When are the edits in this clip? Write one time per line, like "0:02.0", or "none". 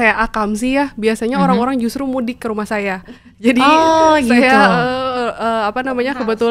none